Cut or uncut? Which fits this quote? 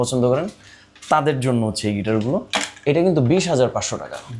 uncut